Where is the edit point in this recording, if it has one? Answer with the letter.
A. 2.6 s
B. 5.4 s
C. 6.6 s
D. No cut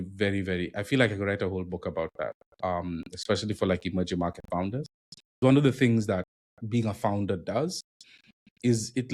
B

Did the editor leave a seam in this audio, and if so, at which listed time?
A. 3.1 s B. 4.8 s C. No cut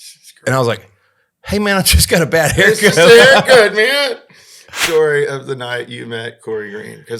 B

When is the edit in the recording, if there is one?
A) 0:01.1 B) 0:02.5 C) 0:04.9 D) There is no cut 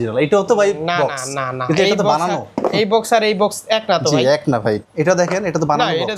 C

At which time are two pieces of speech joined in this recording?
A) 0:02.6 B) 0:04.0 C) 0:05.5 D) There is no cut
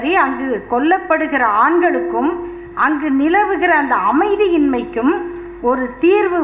D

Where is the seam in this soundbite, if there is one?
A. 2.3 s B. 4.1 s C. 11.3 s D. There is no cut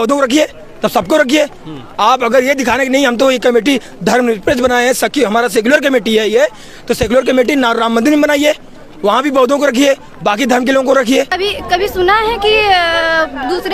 C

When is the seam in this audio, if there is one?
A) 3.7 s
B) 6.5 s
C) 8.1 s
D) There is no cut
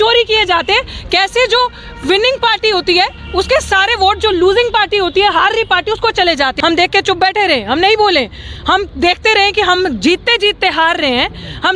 B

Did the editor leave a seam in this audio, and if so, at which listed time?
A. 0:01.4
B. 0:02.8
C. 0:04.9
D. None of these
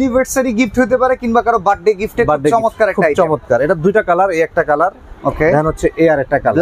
D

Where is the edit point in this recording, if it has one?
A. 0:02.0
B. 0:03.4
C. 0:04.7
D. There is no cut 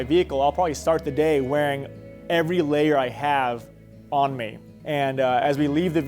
C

